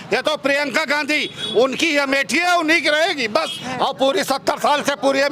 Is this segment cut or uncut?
cut